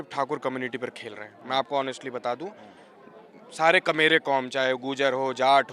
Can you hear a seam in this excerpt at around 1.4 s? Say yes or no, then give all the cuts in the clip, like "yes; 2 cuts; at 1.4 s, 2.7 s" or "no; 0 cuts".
no; 0 cuts